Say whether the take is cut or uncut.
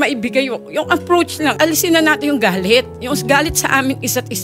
cut